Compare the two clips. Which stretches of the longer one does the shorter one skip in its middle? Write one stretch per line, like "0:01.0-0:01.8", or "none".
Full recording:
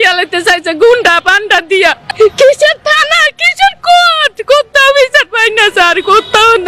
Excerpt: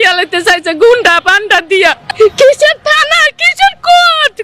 none